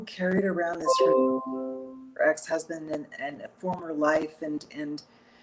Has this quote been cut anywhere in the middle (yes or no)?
no